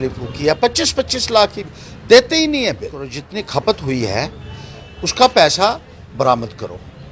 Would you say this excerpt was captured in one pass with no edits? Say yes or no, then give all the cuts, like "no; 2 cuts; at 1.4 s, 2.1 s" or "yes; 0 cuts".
no; 1 cut; at 3.2 s